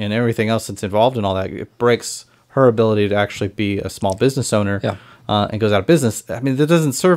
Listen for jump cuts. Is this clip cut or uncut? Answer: uncut